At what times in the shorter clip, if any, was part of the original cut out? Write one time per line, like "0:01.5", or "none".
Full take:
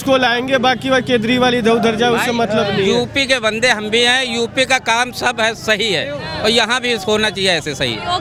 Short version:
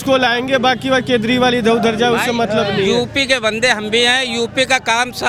none